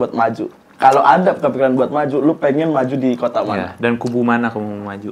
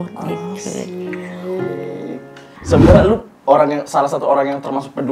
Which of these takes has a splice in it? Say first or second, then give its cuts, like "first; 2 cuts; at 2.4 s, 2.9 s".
second; 1 cut; at 2.5 s